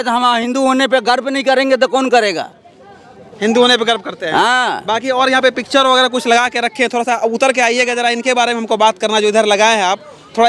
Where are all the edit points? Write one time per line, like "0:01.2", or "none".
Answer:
none